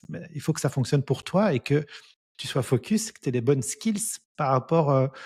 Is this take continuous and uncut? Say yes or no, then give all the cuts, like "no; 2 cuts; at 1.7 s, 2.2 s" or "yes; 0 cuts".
yes; 0 cuts